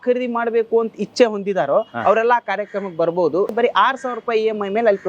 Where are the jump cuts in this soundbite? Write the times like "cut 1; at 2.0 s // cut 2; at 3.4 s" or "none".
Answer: cut 1; at 3.5 s